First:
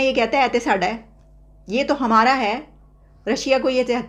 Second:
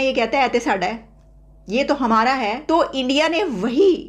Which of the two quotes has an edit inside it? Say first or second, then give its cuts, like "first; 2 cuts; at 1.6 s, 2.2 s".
second; 1 cut; at 2.6 s